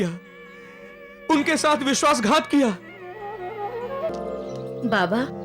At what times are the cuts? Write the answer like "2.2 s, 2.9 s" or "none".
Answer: 4.1 s

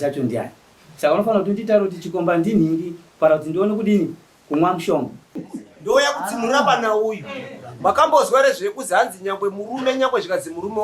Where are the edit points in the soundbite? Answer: 5.4 s

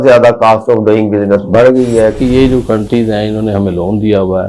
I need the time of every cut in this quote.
2.2 s

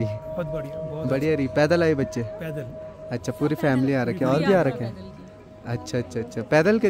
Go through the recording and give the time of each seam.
none

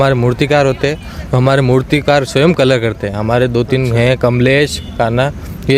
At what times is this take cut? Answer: none

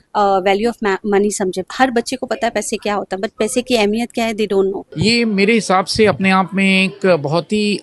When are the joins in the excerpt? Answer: 1.6 s, 4.9 s

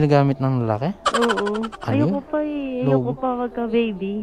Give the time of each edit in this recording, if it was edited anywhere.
1.8 s

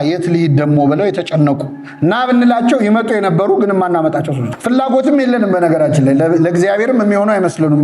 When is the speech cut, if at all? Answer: 4.5 s

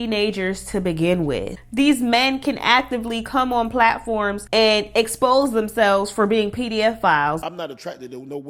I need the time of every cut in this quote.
1.5 s, 4.4 s, 7.4 s

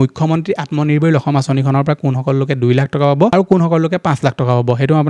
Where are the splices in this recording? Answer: 3.3 s

